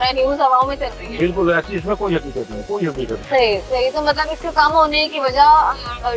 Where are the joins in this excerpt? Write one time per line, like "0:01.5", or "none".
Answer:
none

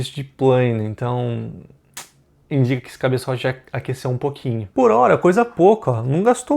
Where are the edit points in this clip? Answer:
0:04.7

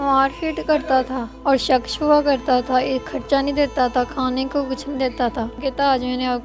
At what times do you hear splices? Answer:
0:01.2
0:05.6

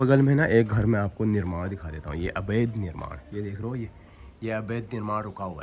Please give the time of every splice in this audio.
none

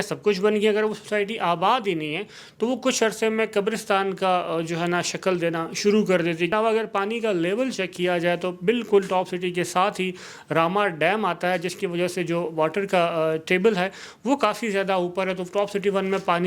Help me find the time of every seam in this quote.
0:06.5

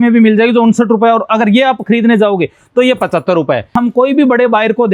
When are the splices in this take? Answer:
0:03.7

